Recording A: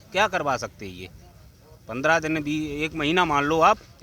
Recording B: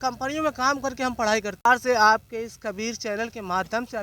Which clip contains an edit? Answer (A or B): B